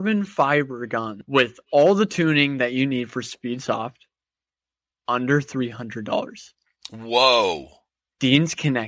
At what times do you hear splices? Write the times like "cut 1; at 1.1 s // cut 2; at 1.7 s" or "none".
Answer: cut 1; at 1.1 s